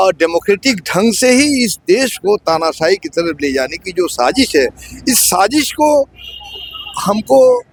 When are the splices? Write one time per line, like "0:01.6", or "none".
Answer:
none